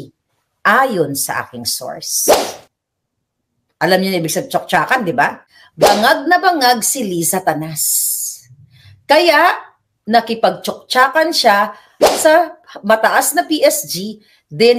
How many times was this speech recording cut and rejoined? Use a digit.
1